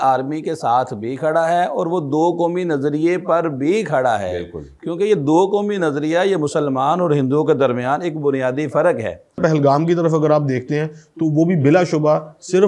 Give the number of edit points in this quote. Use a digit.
1